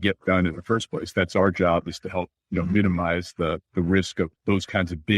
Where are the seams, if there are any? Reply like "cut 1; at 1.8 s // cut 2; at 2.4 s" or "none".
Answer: cut 1; at 2.4 s // cut 2; at 3.6 s // cut 3; at 4.4 s